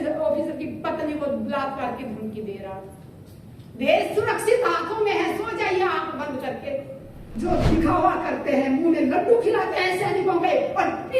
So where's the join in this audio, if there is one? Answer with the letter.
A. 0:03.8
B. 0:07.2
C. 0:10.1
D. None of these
B